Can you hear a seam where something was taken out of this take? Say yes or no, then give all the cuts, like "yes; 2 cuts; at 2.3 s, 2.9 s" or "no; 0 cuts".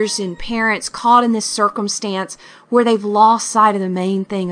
no; 0 cuts